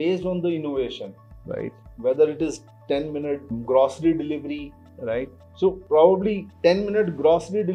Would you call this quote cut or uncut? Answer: uncut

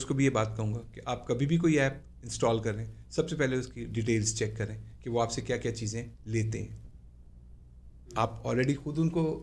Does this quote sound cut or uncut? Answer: uncut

